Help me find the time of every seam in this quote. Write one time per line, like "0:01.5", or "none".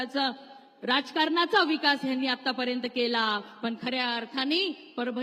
none